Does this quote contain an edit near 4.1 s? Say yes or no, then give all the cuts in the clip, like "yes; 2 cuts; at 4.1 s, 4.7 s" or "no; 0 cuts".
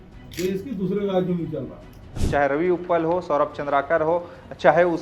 no; 1 cut; at 2.2 s